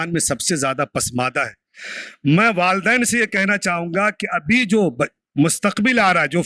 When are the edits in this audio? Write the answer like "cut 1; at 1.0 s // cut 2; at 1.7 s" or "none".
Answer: none